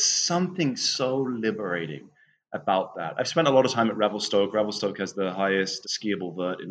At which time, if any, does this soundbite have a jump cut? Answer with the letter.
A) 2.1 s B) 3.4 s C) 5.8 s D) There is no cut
C